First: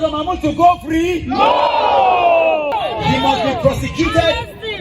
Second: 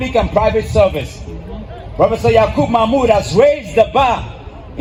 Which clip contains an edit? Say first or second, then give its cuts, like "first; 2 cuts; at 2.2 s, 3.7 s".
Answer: first; 1 cut; at 2.7 s